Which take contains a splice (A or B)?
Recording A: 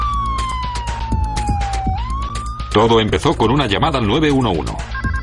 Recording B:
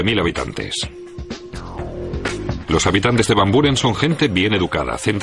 A